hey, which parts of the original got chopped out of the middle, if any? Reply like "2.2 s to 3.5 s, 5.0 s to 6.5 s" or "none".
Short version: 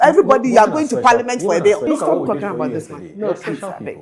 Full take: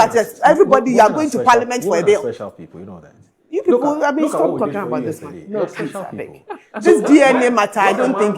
2.3 s to 4.2 s